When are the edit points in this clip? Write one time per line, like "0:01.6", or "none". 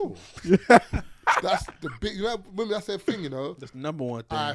none